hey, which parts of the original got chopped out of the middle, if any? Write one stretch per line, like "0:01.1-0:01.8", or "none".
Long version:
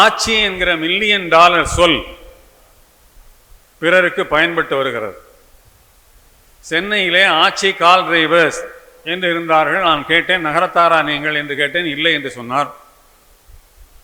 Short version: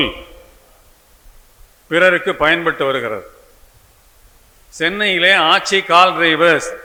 none